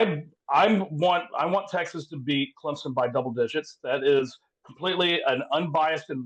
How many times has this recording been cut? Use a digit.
0